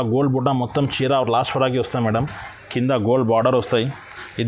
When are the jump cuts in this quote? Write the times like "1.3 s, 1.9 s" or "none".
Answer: none